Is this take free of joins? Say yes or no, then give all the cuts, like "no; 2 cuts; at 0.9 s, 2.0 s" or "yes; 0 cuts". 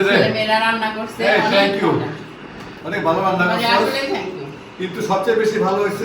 yes; 0 cuts